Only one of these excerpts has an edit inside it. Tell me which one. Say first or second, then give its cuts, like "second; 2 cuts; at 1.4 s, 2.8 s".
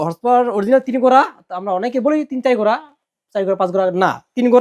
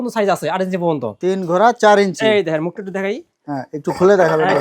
second; 1 cut; at 1.1 s